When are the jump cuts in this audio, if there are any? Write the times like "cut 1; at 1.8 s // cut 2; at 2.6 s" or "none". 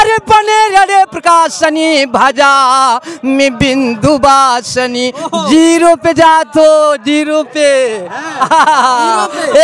none